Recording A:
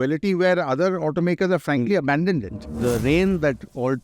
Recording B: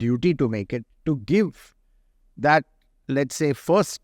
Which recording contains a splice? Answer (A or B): A